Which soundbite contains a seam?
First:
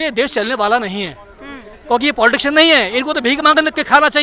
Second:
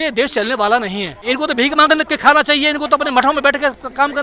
second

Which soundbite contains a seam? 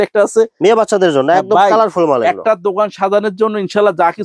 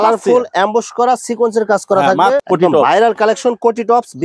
second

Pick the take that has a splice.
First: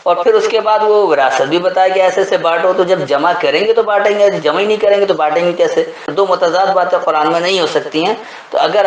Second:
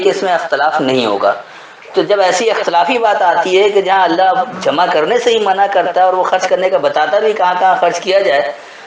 first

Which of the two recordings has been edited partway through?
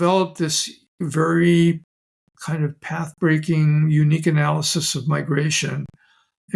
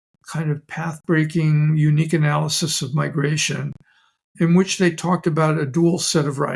first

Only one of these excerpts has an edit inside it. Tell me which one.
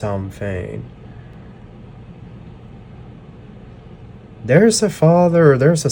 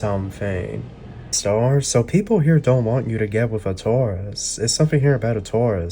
second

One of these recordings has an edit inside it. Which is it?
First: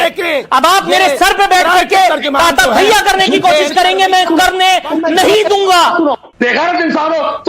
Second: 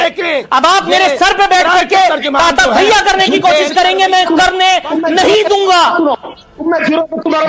first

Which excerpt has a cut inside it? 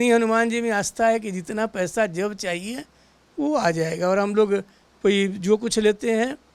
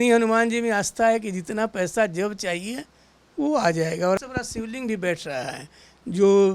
second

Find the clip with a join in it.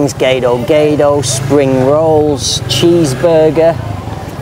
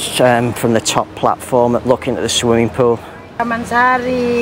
second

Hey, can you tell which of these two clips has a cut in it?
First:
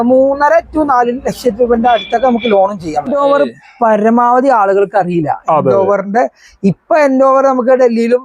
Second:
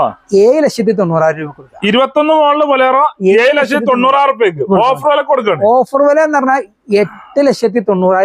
first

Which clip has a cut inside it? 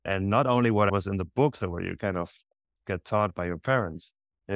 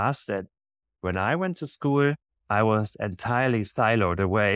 first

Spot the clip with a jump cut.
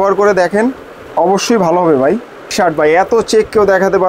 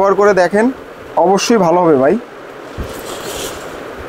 first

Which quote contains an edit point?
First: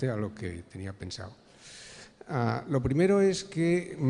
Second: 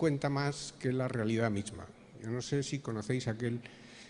second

